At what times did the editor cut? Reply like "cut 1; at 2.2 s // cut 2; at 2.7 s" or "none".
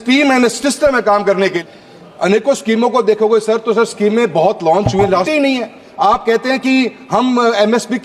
cut 1; at 1.6 s // cut 2; at 5.3 s